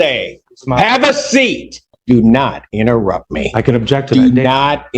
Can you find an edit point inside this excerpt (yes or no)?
yes